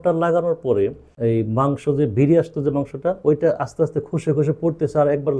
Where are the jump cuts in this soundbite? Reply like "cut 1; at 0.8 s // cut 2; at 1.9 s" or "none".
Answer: cut 1; at 1.1 s